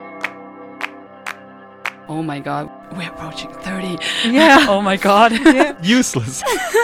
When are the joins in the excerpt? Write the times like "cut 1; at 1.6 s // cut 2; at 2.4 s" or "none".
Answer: cut 1; at 1.1 s